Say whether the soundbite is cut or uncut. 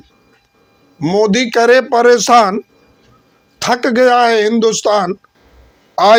uncut